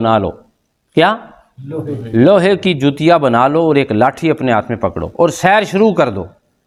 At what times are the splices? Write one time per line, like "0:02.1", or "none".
none